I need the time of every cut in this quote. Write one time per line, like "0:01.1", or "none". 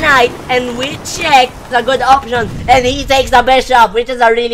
0:01.6

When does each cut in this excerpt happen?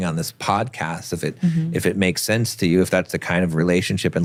none

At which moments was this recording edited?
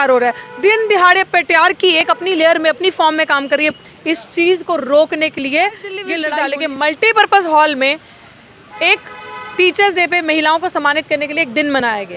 0:06.2

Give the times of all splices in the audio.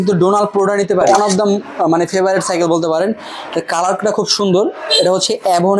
0:01.0

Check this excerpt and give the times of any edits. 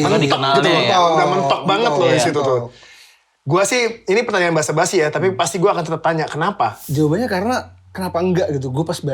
0:06.8

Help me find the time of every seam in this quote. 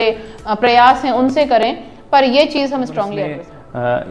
0:03.2

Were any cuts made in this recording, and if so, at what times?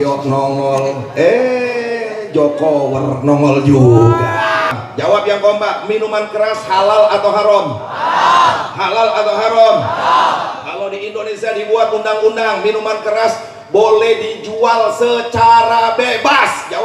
0:04.7

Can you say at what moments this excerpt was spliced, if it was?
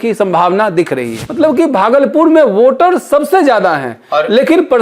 0:01.2

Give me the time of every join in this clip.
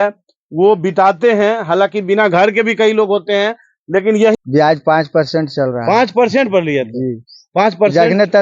0:04.4

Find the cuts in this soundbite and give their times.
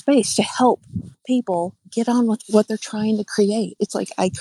0:01.2
0:02.2

